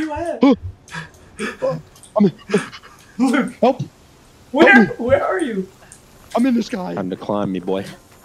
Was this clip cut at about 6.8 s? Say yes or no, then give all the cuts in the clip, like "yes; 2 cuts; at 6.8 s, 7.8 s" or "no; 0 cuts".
yes; 1 cut; at 6.8 s